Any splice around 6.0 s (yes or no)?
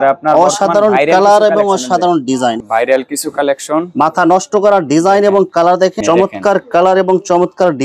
yes